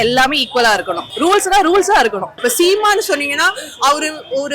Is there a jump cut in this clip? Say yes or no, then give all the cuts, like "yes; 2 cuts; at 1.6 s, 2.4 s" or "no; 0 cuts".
yes; 2 cuts; at 1.0 s, 2.3 s